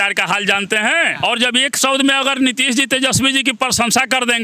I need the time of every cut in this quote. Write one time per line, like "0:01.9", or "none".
0:01.1